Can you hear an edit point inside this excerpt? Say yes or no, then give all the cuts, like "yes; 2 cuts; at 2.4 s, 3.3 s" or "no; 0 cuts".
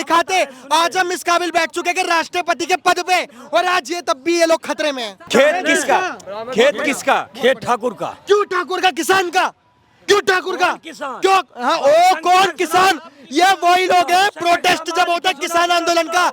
yes; 1 cut; at 5.2 s